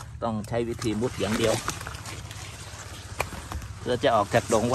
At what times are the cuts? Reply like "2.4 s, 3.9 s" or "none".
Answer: none